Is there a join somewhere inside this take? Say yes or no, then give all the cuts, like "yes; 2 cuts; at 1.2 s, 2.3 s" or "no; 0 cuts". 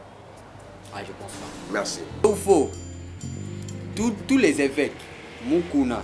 yes; 1 cut; at 2.2 s